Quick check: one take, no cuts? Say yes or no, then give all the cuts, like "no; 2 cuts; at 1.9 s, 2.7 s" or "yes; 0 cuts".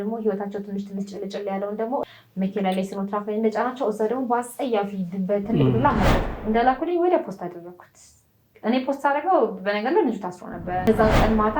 no; 3 cuts; at 2.0 s, 6.2 s, 10.9 s